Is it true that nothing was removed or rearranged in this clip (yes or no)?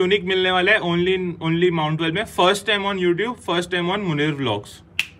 yes